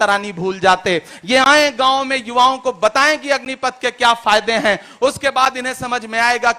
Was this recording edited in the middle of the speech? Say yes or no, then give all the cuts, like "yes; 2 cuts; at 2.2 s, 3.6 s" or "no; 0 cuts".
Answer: no; 0 cuts